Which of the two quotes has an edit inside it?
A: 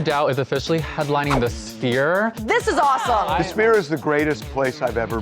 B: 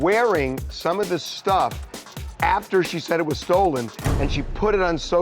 A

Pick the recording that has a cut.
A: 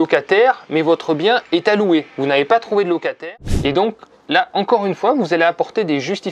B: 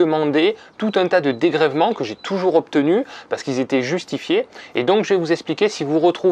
A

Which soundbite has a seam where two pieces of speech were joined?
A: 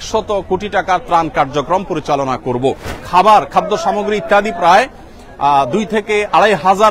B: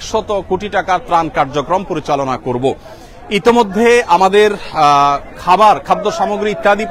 A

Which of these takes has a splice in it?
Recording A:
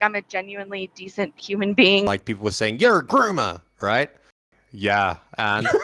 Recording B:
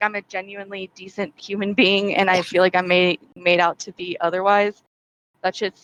A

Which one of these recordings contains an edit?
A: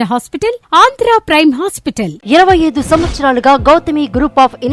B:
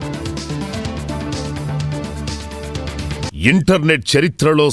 B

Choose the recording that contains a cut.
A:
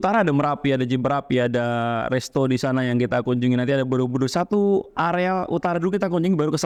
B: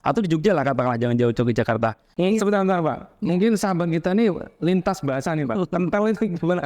B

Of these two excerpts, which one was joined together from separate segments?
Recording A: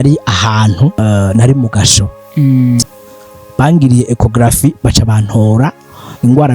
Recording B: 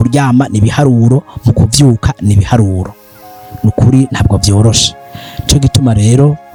A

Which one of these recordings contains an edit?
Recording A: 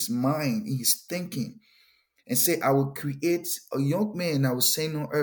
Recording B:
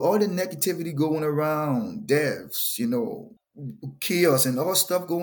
B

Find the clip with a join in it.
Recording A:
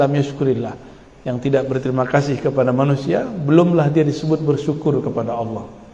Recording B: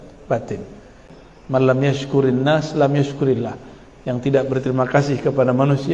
B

